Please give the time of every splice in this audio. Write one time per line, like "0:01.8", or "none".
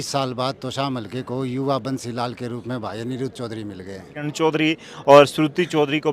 0:04.3